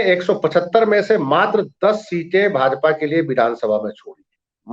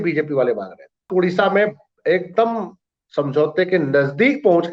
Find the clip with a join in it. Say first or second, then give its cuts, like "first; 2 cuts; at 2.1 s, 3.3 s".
second; 1 cut; at 1.1 s